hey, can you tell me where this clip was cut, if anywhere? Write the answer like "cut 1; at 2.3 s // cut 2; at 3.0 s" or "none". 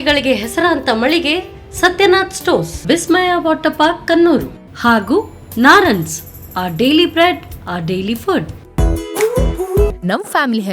cut 1; at 8.6 s